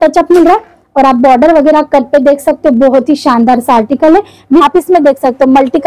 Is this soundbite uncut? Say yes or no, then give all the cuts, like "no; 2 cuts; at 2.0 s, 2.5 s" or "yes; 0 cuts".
no; 1 cut; at 4.6 s